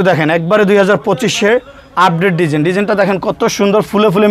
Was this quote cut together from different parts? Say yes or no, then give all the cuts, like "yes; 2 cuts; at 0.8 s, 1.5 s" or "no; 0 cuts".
no; 0 cuts